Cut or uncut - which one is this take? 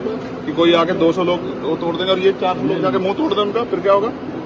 uncut